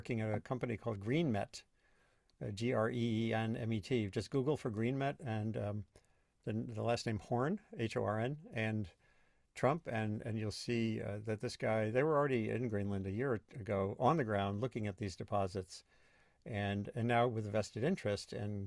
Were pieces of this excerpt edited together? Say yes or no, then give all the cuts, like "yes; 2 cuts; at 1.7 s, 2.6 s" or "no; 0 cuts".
no; 0 cuts